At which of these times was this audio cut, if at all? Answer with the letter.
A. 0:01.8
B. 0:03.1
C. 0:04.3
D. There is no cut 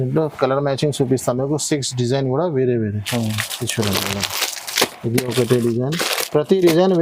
D